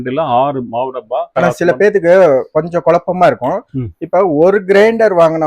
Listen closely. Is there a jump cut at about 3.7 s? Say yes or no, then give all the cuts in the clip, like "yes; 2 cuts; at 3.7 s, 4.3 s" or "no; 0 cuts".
no; 2 cuts; at 1.3 s, 2.5 s